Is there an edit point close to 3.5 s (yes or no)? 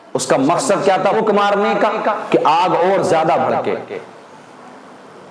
no